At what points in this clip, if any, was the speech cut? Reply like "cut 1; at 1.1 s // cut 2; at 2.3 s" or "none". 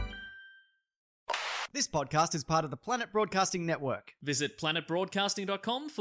cut 1; at 1.2 s